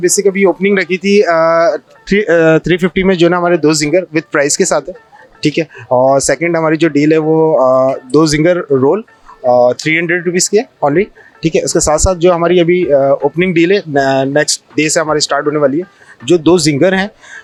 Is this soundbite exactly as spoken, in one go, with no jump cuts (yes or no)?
yes